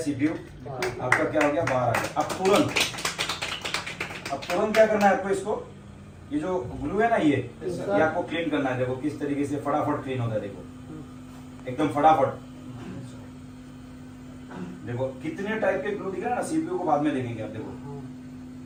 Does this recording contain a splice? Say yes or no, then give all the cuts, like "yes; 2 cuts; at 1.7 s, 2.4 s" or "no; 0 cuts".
no; 0 cuts